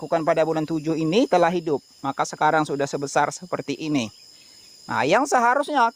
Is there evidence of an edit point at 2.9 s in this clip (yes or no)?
no